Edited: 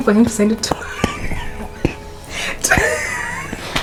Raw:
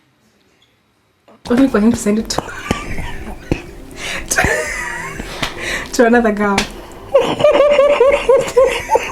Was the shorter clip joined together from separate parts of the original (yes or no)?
no